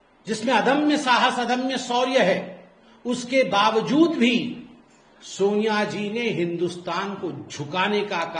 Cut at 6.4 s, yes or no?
no